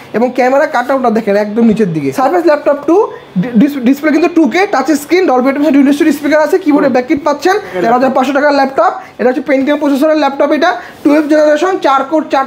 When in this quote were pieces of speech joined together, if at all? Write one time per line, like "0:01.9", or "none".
0:02.1
0:07.7